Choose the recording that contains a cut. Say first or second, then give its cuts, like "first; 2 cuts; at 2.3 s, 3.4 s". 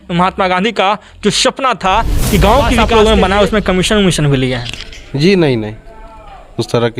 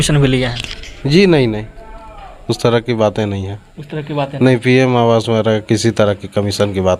first; 1 cut; at 2.8 s